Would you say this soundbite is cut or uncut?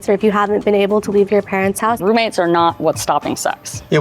cut